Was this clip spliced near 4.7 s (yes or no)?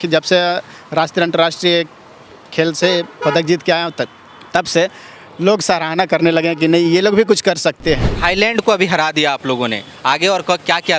no